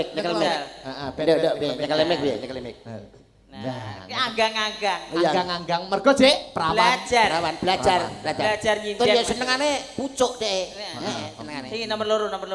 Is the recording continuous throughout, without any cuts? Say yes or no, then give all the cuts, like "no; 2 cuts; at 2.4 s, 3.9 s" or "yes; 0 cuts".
yes; 0 cuts